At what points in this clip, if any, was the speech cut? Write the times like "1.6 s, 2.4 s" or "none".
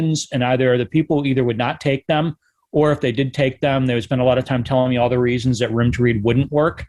none